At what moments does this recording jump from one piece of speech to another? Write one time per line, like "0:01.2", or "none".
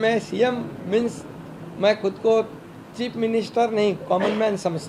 none